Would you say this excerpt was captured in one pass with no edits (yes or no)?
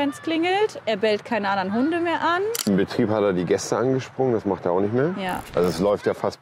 no